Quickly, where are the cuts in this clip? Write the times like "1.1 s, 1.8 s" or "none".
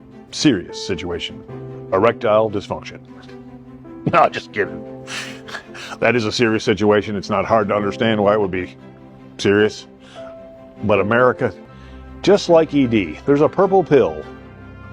11.6 s